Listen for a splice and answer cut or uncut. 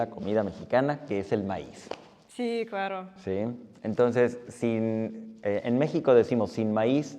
uncut